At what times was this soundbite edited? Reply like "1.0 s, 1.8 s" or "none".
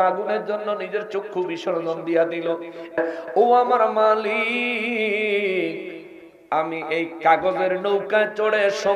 3.0 s